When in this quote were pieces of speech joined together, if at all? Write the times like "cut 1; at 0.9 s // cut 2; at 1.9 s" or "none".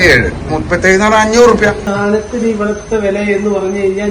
cut 1; at 1.9 s